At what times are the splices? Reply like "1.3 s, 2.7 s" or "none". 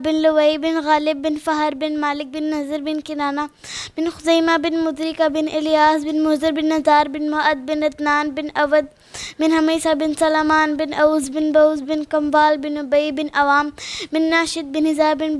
none